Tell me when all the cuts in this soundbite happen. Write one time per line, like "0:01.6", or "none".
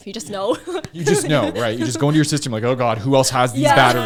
none